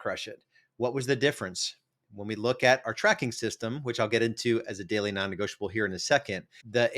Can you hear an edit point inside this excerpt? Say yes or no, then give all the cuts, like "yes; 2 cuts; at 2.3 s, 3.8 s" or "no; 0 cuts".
no; 0 cuts